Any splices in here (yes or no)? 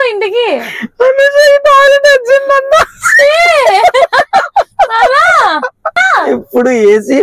yes